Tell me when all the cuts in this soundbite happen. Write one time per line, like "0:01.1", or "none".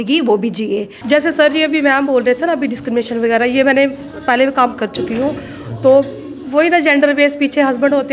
0:00.9